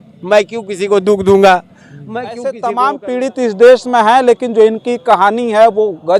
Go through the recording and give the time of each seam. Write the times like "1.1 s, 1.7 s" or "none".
2.4 s